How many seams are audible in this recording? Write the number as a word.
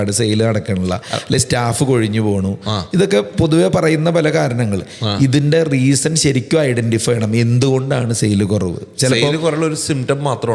zero